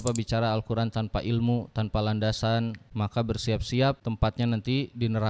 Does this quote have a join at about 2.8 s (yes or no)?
yes